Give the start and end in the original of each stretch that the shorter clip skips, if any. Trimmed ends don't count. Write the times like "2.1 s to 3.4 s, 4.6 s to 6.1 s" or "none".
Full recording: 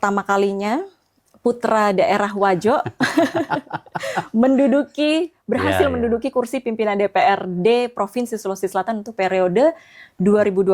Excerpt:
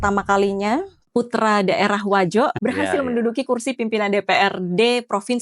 1.0 s to 1.3 s, 2.9 s to 5.4 s